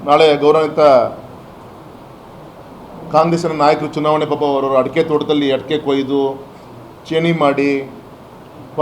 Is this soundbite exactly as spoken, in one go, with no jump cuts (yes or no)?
yes